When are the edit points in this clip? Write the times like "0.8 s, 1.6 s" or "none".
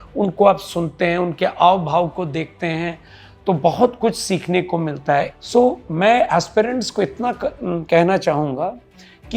5.4 s